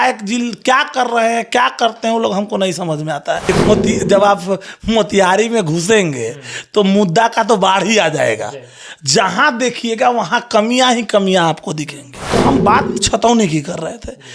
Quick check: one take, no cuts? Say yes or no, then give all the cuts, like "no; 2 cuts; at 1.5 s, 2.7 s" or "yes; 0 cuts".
no; 2 cuts; at 3.5 s, 12.3 s